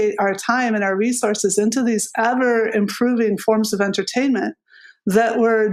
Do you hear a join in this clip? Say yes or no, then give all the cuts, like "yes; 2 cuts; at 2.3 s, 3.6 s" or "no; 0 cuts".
no; 0 cuts